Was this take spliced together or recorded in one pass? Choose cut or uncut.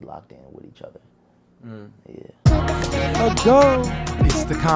cut